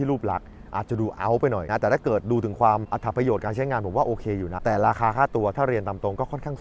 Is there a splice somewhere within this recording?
yes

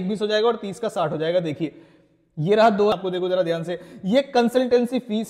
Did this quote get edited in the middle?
yes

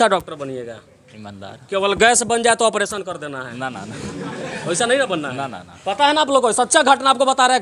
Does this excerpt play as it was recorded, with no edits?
yes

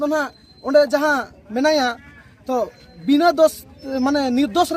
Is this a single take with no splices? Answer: yes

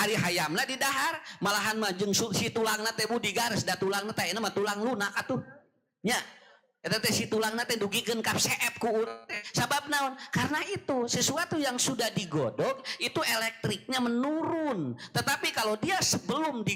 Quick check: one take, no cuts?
yes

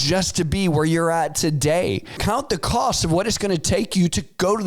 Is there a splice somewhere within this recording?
yes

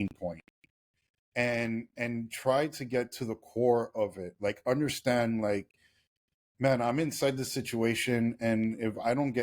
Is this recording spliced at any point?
no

